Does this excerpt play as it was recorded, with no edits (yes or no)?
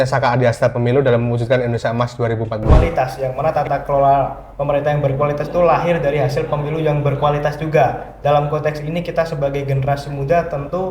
no